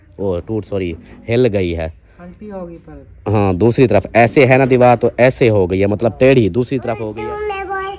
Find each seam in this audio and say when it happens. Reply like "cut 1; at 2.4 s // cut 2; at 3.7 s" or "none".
cut 1; at 7.0 s